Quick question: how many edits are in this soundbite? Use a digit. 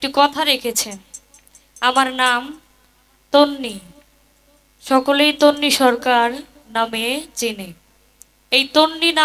0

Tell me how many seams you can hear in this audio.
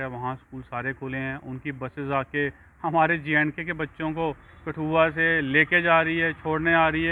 0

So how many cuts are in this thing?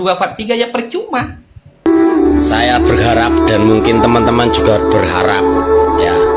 1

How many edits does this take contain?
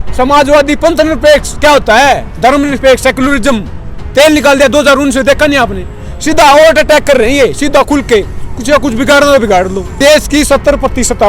1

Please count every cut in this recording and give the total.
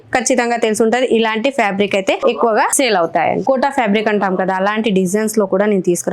2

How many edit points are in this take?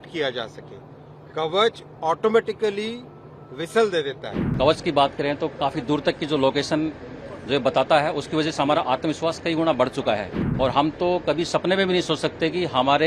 2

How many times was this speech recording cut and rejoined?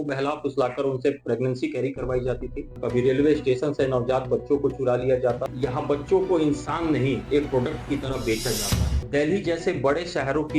3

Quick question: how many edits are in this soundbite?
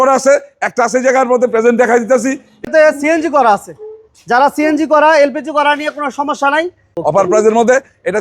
2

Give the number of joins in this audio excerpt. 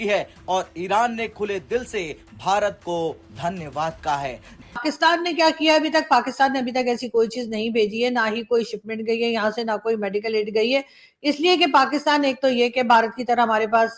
1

